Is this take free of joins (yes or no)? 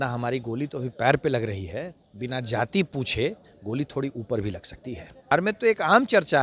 no